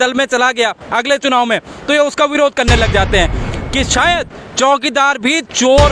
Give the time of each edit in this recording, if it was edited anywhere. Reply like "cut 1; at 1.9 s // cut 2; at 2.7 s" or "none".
cut 1; at 3.4 s